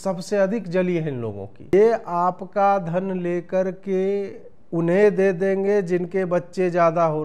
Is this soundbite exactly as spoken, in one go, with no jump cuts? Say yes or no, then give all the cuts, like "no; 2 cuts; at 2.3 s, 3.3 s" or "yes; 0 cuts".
no; 1 cut; at 1.7 s